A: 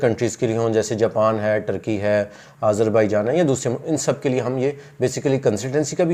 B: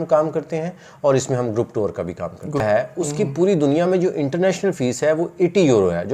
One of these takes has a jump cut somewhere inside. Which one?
B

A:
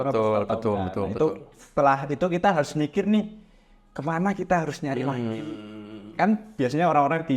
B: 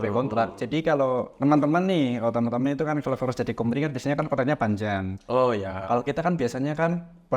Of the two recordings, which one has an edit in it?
B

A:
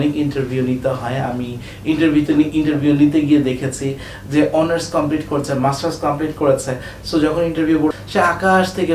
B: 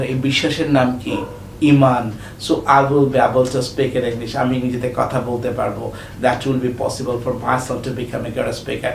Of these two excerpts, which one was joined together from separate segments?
A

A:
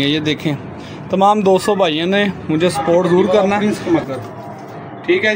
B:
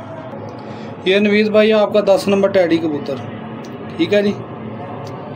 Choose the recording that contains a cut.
A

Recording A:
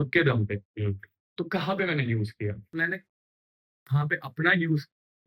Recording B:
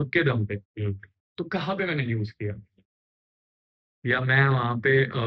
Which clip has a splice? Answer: A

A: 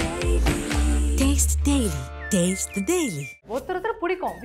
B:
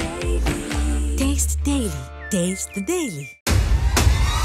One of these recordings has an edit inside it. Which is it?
A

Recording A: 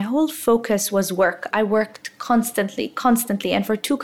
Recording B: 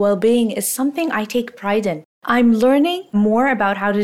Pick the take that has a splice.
B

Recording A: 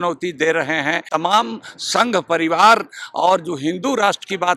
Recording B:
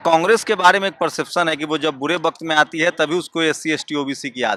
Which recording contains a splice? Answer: A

